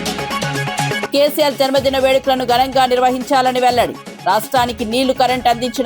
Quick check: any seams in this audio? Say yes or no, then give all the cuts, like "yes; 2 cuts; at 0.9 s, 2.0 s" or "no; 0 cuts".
yes; 1 cut; at 1.1 s